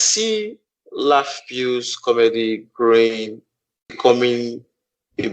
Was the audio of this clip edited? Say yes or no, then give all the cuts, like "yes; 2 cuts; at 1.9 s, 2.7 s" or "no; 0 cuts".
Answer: no; 0 cuts